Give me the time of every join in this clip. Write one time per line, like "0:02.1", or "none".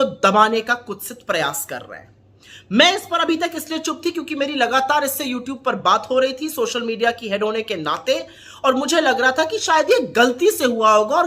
none

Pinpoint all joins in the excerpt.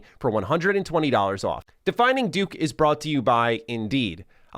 0:01.7

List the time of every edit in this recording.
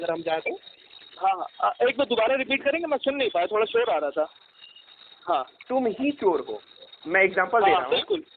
0:04.6

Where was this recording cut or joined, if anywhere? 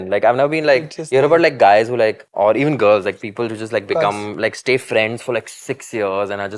0:02.2

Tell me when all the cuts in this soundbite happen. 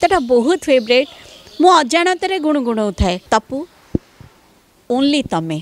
0:03.2

